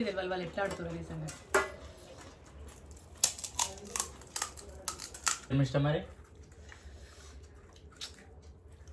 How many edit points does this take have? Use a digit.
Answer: 1